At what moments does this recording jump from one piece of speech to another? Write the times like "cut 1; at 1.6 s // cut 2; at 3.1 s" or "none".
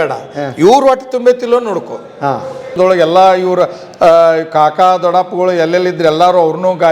cut 1; at 2.7 s